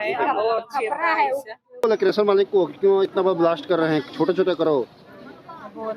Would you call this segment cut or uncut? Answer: cut